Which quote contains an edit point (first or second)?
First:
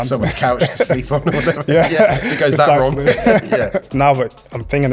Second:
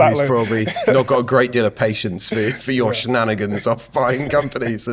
first